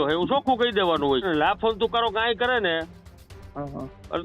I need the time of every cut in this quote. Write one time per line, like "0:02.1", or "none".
0:01.2